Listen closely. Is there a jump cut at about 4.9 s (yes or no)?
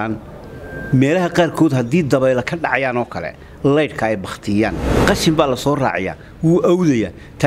yes